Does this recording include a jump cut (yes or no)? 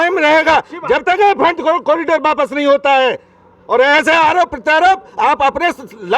no